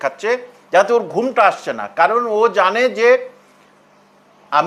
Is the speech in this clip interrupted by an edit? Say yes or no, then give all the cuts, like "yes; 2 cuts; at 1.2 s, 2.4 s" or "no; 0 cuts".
no; 0 cuts